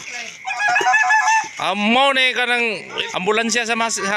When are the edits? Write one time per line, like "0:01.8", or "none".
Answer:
0:03.0